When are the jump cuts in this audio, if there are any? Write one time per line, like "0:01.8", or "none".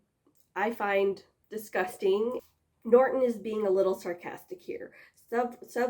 0:02.4